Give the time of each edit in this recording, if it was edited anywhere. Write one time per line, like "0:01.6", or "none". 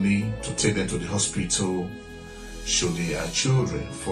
none